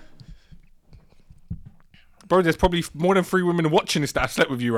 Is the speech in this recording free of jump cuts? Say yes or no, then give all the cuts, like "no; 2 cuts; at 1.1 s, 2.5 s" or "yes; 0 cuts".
yes; 0 cuts